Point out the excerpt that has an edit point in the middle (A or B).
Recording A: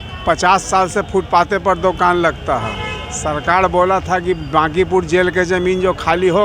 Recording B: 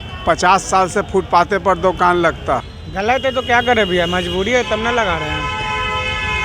B